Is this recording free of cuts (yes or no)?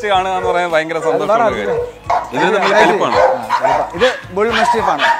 no